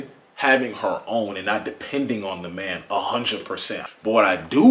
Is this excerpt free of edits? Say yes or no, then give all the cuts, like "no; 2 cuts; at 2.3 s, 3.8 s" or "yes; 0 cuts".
no; 1 cut; at 3.7 s